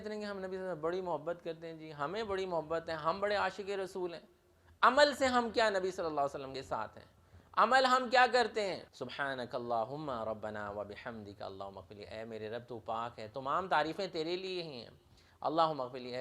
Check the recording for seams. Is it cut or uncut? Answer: cut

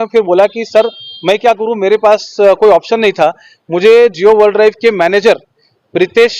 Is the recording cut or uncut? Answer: uncut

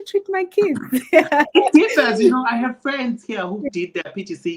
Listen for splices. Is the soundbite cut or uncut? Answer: uncut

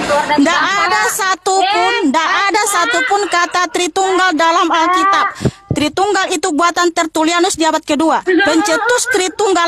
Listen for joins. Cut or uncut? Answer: uncut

